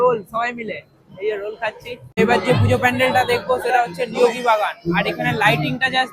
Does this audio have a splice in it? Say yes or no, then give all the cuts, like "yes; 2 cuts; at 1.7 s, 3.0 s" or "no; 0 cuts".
yes; 1 cut; at 2.2 s